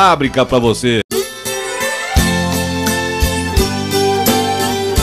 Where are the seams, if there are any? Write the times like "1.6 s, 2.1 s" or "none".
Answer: 1.1 s

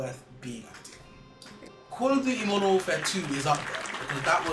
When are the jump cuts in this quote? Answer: 1.8 s

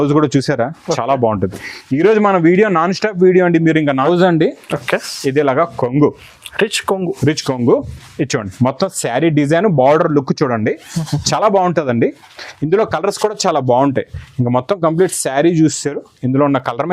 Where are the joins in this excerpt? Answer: 4.1 s

